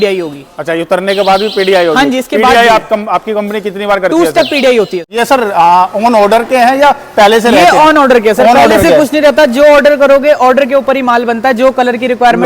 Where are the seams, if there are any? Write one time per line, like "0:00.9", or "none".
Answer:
0:05.1